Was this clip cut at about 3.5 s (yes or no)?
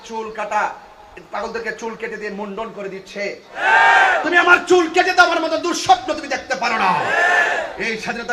yes